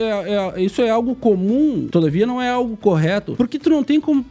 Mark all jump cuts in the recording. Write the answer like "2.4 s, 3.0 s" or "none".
1.8 s, 3.3 s